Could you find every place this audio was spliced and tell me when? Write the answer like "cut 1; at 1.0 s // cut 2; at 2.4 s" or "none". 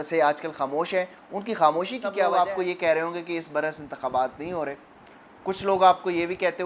cut 1; at 2.1 s